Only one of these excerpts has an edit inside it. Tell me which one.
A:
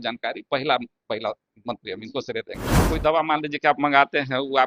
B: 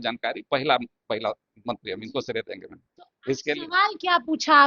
A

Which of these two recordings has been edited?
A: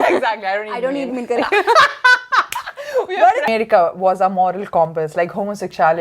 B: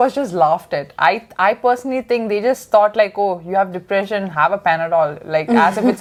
A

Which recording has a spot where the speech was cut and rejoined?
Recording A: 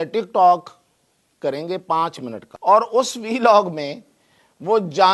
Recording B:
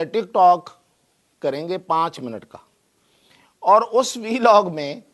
A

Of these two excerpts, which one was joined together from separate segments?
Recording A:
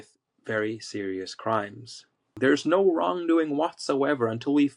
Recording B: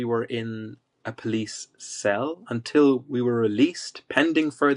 A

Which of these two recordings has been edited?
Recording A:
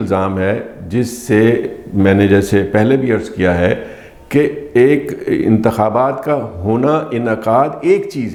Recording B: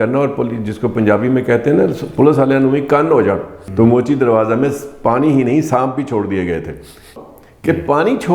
B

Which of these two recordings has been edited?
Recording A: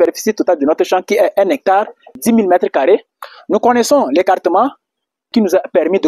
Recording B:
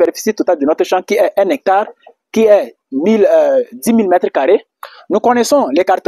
A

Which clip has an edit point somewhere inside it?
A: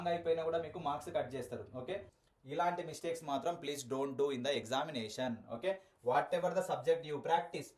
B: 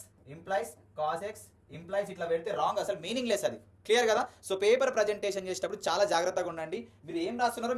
A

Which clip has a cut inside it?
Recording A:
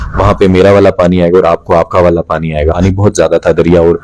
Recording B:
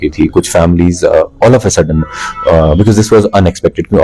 A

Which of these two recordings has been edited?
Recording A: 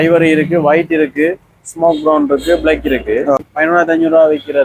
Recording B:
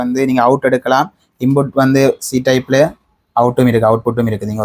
A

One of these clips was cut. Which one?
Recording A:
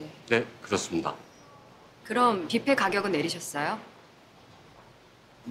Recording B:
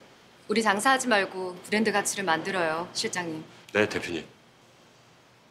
B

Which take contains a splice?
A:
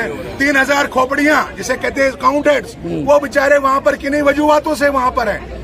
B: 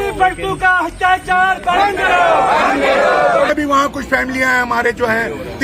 B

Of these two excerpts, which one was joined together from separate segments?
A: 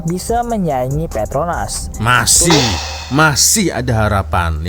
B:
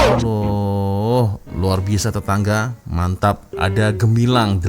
B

